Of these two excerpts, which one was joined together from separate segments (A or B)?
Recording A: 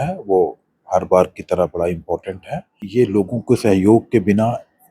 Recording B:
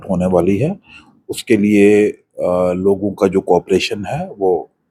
A